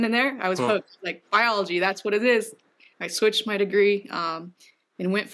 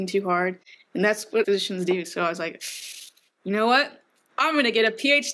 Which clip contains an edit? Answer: second; 1 cut; at 1.4 s

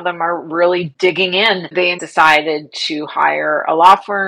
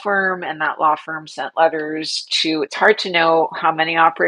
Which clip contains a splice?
first; 2 cuts; at 0.9 s, 2.0 s

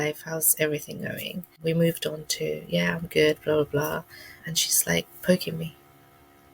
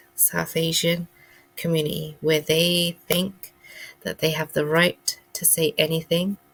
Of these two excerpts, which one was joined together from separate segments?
first; 2 cuts; at 1.5 s, 4.4 s

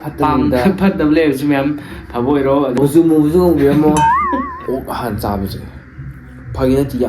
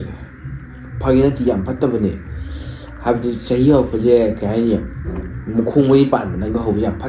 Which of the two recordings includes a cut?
first; 2 cuts; at 2.8 s, 4.5 s

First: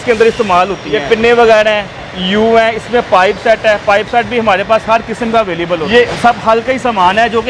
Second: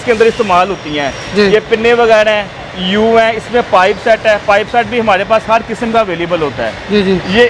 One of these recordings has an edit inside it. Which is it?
first; 2 cuts; at 1.0 s, 5.8 s

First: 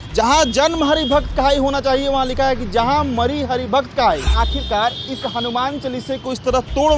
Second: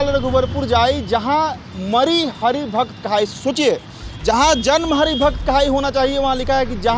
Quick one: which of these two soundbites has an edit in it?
first; 1 cut; at 4.3 s

